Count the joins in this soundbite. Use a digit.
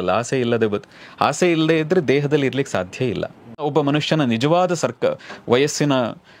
1